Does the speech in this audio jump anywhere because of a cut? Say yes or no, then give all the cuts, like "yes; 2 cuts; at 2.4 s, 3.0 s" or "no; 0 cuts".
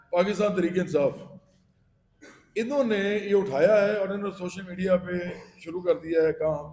no; 0 cuts